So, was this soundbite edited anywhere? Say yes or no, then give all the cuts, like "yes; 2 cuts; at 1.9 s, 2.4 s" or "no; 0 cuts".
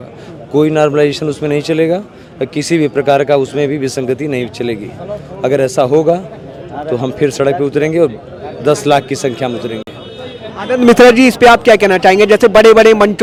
no; 0 cuts